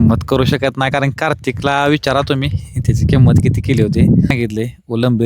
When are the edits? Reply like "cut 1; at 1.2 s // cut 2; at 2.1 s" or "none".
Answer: cut 1; at 4.3 s